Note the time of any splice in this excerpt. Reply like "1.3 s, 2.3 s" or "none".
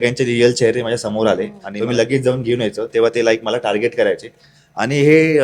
1.7 s